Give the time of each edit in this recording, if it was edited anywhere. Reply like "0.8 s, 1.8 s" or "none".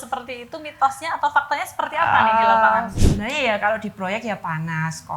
2.9 s